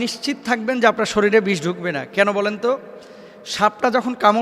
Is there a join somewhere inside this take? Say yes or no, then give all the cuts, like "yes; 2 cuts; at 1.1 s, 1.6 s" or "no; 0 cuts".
no; 0 cuts